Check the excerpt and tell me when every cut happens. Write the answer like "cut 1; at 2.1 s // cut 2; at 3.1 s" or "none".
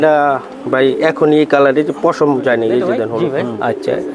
cut 1; at 3.2 s